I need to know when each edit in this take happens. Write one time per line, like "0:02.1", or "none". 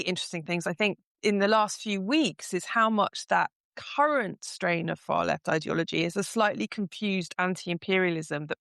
none